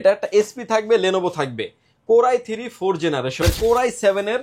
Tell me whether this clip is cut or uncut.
cut